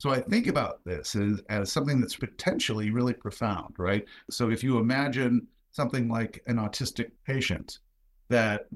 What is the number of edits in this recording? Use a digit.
3